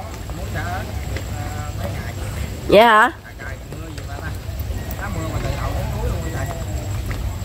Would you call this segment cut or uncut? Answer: uncut